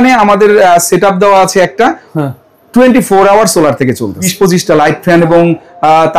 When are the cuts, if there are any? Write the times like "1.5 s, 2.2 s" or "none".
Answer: 4.2 s